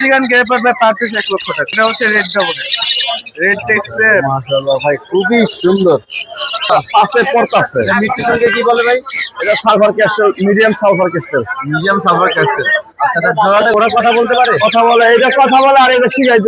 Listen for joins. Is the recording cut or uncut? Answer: cut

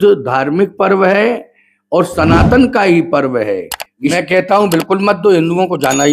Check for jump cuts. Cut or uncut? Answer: cut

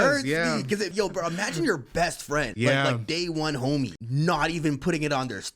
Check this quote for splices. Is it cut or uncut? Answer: cut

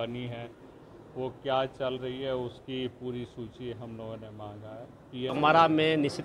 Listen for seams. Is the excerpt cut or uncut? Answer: cut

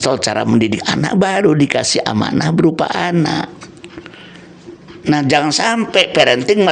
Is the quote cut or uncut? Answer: uncut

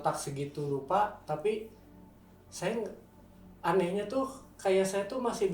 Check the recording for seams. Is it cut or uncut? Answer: uncut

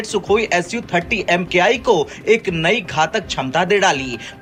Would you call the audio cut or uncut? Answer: uncut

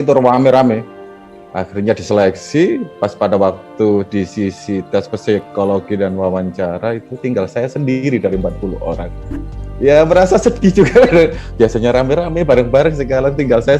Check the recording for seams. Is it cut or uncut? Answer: uncut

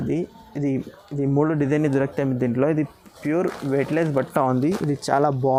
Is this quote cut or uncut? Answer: uncut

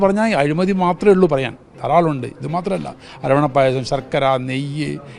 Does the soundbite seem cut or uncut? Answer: uncut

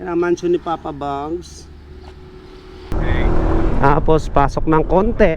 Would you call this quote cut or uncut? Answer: cut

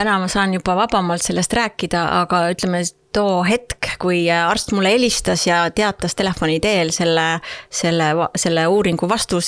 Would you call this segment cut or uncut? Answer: uncut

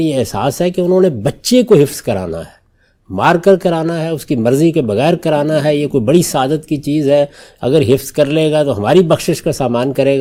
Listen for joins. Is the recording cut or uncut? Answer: uncut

